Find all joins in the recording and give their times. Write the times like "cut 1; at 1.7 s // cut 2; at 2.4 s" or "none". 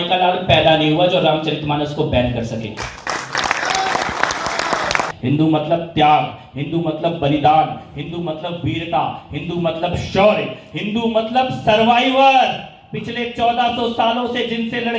cut 1; at 5.1 s